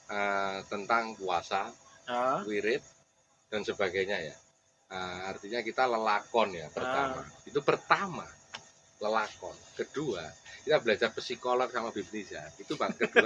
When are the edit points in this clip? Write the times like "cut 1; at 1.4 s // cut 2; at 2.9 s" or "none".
none